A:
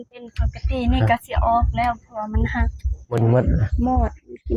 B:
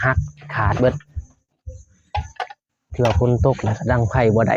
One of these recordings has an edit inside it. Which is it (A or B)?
A